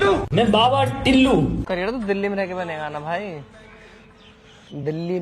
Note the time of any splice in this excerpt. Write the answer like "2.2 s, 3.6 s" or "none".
1.6 s